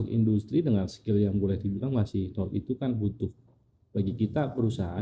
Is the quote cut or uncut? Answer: uncut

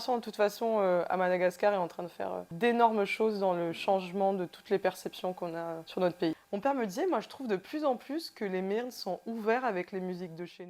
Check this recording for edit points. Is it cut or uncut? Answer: cut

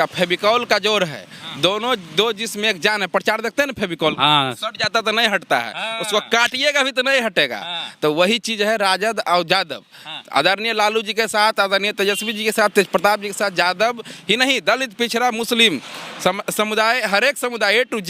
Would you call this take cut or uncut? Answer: uncut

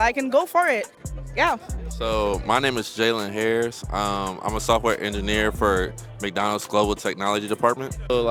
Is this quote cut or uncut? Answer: uncut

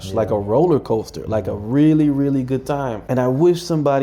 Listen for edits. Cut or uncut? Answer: cut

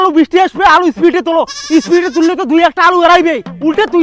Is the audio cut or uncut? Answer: uncut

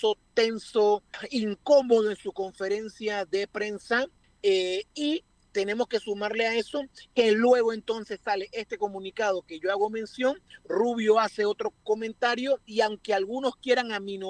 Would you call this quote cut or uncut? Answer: cut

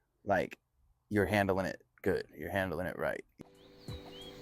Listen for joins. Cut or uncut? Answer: cut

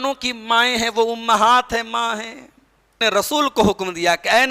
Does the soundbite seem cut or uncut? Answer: cut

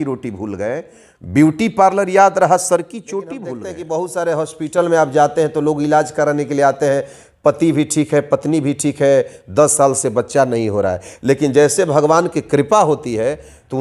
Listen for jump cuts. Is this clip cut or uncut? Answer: cut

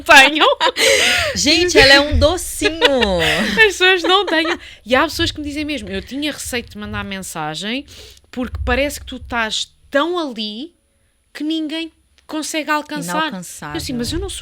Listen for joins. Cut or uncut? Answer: uncut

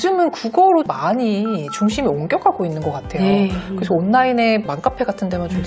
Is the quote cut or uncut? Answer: uncut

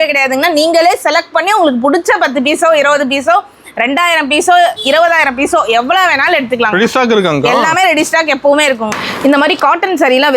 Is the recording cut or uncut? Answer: cut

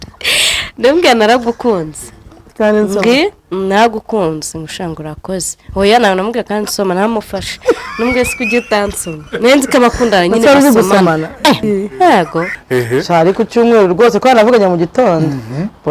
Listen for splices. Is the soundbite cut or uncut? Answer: cut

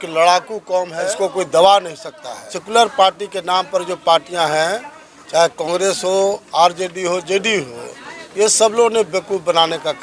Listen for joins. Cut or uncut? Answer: cut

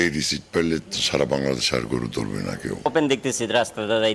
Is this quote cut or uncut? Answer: cut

